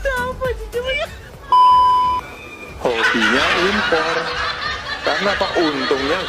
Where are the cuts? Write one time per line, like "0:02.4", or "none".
0:01.0

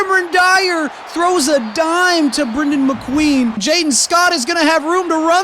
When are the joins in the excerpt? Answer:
0:03.6

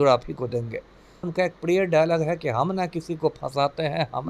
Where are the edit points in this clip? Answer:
0:01.3

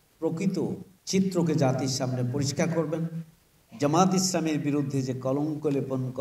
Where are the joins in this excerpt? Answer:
0:00.9

